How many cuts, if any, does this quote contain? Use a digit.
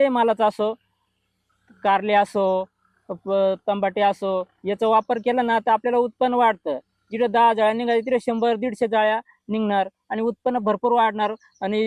0